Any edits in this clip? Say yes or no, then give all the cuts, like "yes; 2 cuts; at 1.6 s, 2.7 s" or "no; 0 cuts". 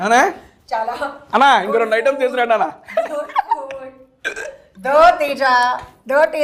no; 0 cuts